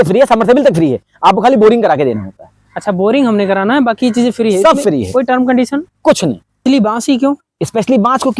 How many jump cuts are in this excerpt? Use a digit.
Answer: 1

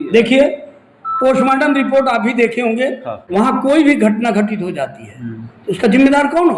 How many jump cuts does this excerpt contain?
1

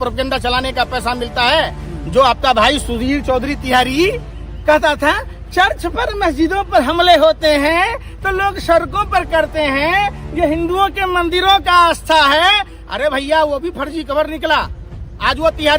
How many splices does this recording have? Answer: 0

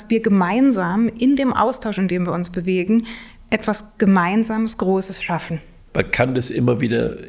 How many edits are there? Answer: 1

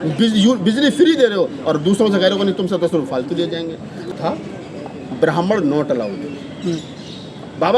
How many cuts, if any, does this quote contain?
1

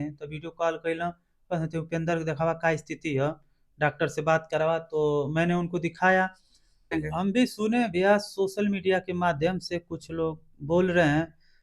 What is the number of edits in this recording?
1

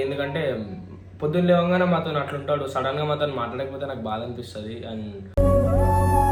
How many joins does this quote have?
0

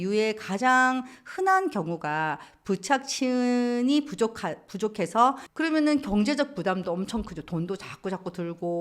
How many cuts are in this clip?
1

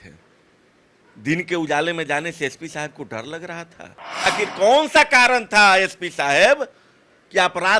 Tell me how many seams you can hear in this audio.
1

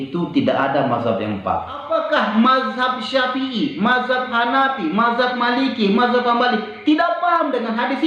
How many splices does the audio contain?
1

